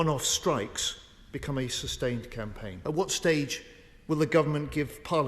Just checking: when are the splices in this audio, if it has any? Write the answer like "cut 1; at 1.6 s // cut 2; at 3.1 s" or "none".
cut 1; at 2.7 s